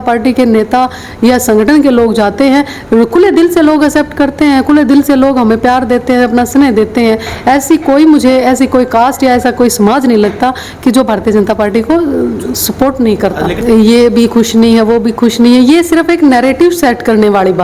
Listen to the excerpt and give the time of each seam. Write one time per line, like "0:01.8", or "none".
0:13.6